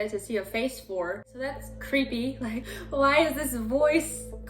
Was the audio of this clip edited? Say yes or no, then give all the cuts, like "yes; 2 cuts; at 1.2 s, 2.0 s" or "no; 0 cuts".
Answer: yes; 1 cut; at 1.3 s